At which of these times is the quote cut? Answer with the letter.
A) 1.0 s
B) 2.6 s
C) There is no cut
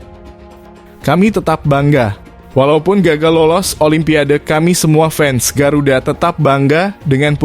A